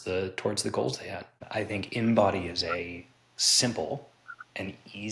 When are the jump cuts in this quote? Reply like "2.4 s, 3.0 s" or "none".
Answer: 1.4 s